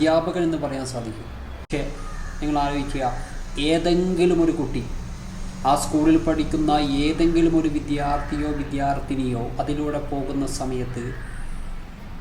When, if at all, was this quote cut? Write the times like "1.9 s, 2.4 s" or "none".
1.7 s